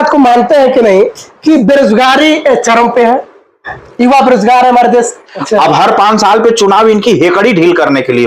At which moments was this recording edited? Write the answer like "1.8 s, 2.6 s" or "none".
5.2 s